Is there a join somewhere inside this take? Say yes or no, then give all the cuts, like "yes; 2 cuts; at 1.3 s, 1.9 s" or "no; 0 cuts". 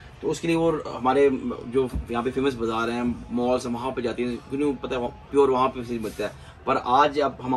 no; 0 cuts